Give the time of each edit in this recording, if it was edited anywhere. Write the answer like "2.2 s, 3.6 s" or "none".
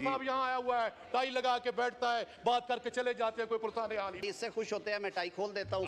4.2 s